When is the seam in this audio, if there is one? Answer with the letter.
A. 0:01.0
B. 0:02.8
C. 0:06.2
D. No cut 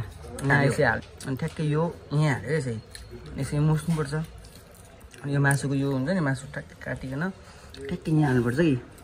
A